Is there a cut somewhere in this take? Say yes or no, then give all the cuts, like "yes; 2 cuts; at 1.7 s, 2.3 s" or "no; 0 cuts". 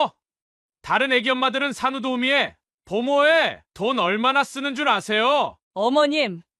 yes; 1 cut; at 5.6 s